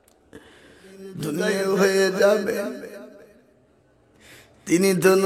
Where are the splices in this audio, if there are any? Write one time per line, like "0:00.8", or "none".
0:01.2